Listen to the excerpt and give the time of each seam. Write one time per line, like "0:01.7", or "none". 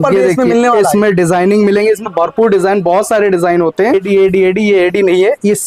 0:04.0